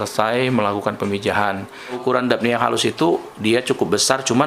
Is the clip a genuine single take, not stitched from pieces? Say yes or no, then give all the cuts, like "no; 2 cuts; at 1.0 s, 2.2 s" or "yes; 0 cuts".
no; 1 cut; at 2.0 s